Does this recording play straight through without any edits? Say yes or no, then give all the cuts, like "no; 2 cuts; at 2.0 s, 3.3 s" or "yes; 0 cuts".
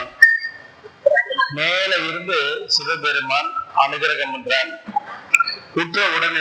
yes; 0 cuts